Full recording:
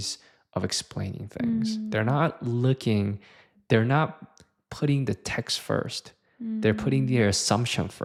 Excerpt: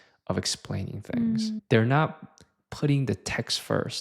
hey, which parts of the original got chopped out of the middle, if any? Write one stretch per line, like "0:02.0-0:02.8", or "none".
0:01.8-0:03.6